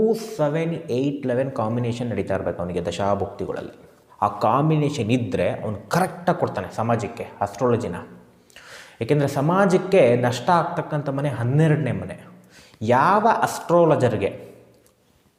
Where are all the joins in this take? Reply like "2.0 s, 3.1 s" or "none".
none